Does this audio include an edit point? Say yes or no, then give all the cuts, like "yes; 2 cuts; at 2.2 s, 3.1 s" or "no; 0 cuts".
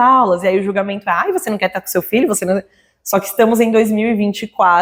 no; 0 cuts